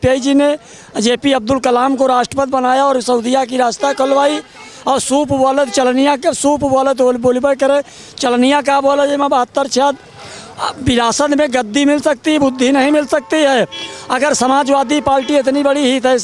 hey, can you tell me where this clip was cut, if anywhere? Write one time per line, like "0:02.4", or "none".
none